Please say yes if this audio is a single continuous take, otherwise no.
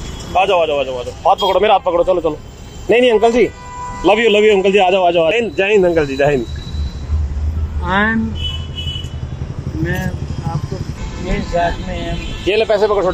no